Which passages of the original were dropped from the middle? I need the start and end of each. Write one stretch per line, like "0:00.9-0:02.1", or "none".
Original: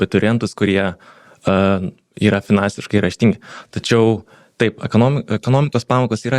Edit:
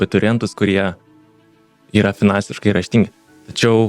0:01.5-0:01.8